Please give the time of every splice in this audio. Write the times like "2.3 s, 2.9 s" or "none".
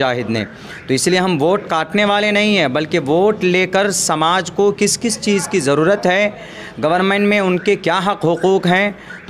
none